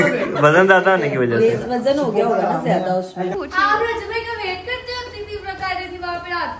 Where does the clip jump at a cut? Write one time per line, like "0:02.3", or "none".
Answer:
0:03.4